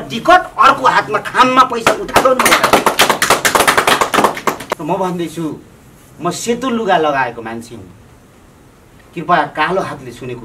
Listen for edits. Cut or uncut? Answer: cut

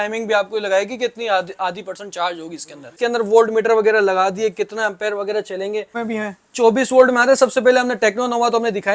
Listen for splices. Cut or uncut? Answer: cut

